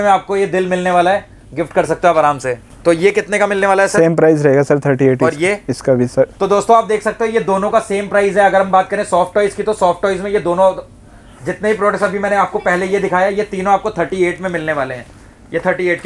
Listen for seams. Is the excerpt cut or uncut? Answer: uncut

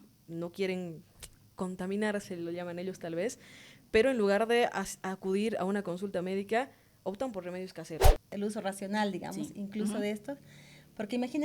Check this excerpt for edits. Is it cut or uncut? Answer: cut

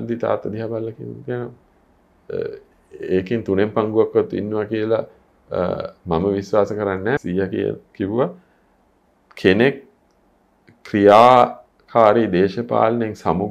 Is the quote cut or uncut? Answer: cut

